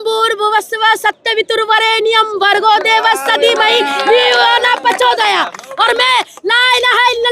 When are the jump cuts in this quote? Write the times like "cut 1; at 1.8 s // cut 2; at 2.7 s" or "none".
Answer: none